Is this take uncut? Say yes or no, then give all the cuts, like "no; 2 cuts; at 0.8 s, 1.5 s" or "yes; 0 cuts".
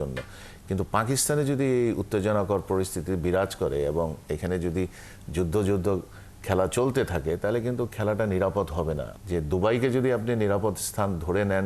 no; 1 cut; at 9.1 s